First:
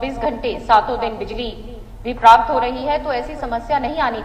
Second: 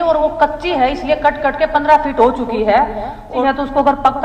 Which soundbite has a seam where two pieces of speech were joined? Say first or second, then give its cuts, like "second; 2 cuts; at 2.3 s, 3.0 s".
second; 1 cut; at 3.3 s